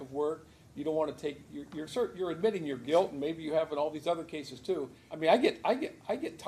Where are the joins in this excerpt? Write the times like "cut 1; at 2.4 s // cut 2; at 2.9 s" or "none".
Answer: cut 1; at 5.0 s